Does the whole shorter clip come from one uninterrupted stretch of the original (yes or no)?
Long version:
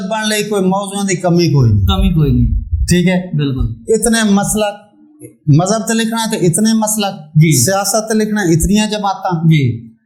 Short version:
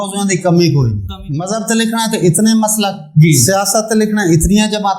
no